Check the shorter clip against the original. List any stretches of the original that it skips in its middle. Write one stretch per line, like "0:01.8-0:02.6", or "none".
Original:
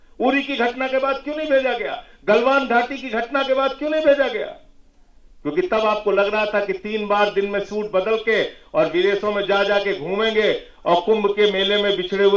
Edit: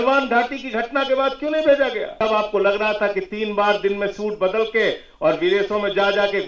0:04.6-0:05.7